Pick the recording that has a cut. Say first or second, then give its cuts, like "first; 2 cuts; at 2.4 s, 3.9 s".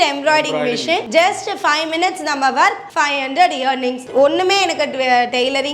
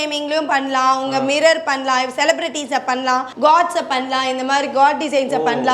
first; 2 cuts; at 1.1 s, 4.0 s